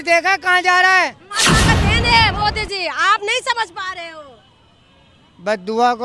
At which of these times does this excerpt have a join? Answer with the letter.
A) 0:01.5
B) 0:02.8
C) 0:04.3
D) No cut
A